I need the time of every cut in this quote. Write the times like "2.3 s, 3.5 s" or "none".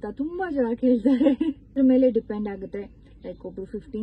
1.7 s

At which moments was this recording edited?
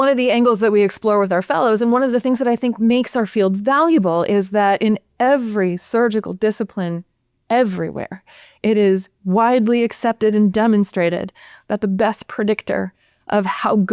none

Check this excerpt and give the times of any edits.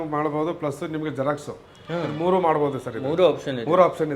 none

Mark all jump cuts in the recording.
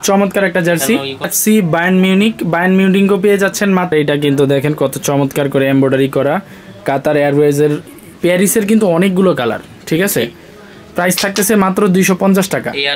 1.3 s, 3.9 s, 8.0 s

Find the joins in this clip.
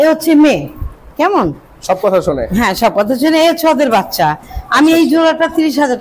none

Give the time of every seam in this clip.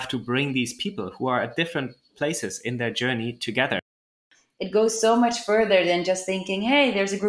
4.1 s

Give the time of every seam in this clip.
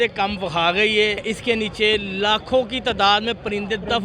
1.2 s

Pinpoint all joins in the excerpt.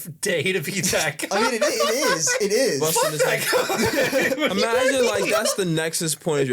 2.8 s

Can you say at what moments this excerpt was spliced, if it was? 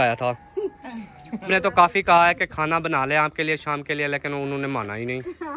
1.5 s

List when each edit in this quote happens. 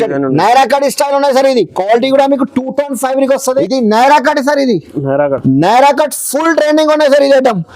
3.7 s

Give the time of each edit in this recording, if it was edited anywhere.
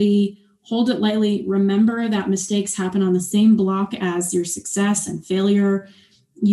none

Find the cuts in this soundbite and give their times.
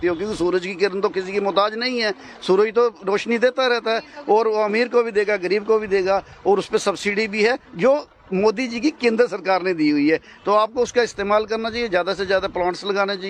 none

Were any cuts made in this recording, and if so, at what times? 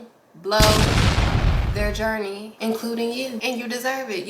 0.8 s, 2.1 s, 3.4 s

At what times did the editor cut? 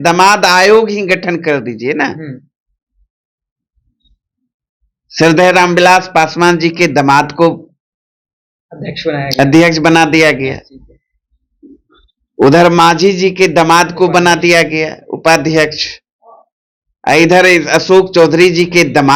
none

